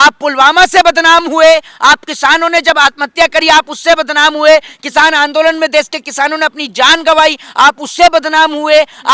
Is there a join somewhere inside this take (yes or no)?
no